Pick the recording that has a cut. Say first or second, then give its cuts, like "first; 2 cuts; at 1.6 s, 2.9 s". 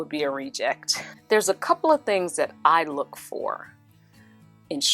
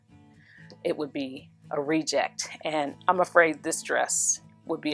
first; 1 cut; at 1.1 s